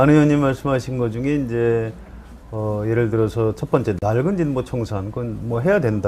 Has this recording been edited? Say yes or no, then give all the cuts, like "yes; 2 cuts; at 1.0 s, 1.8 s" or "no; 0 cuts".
yes; 1 cut; at 1.0 s